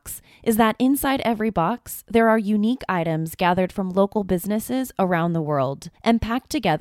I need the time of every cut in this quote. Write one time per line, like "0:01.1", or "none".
0:05.9